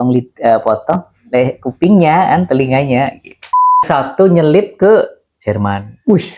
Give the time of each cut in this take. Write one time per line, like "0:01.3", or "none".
0:03.8